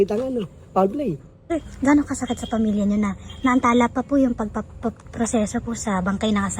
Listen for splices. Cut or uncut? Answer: cut